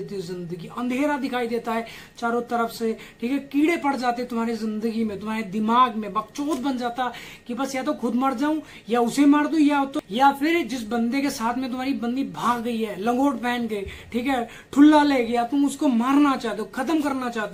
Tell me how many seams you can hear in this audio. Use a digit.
0